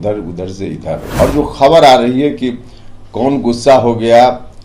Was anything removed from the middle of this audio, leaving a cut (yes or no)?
yes